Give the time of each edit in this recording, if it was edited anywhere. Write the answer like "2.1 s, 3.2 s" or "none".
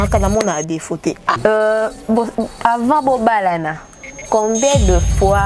1.4 s